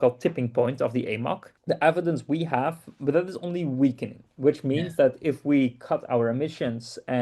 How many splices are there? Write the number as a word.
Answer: one